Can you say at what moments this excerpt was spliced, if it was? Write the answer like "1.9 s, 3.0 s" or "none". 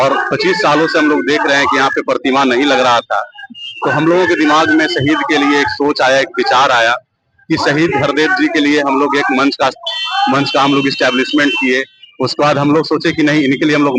none